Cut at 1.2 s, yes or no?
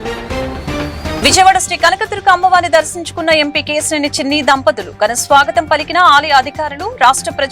yes